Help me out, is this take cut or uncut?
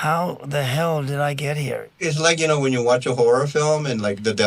cut